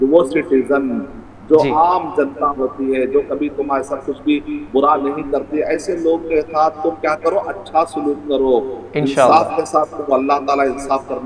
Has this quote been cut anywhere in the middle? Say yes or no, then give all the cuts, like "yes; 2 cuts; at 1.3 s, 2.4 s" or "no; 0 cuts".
no; 0 cuts